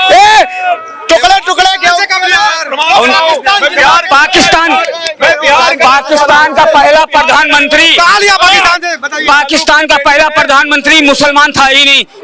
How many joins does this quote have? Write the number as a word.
zero